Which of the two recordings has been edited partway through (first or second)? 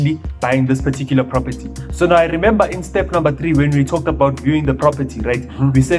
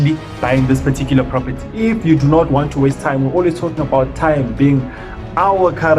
second